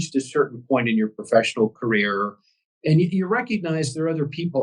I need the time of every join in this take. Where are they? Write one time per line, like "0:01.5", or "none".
none